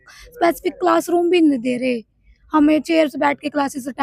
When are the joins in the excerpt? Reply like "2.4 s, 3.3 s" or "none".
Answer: none

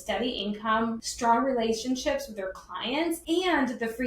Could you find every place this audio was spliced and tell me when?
1.0 s, 3.2 s

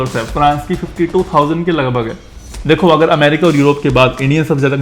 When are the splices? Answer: 2.3 s

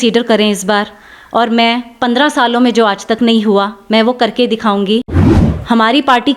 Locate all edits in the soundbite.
5.1 s

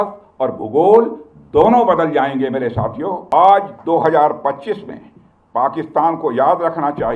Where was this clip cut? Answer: 3.2 s

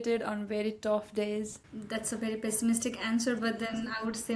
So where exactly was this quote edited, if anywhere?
1.6 s

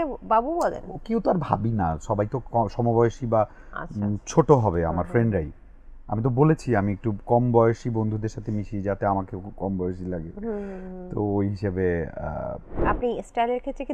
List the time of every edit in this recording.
12.8 s

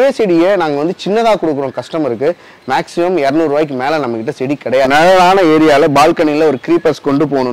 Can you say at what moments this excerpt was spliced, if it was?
4.9 s

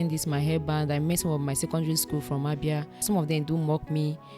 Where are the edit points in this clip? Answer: 3.0 s

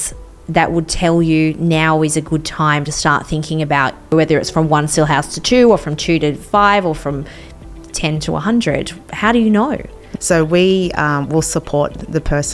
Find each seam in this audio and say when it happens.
4.1 s, 10.0 s

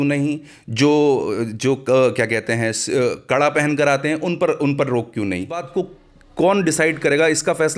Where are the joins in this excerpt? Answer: 5.7 s

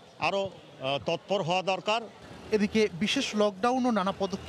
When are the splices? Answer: none

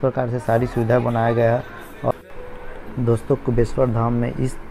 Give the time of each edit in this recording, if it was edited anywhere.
2.1 s

